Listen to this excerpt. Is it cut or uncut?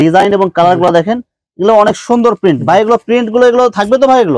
uncut